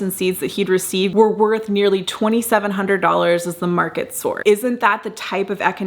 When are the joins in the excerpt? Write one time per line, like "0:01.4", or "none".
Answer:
0:01.1
0:04.4